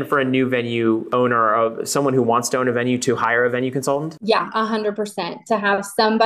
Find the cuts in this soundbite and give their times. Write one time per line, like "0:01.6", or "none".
0:01.1
0:04.1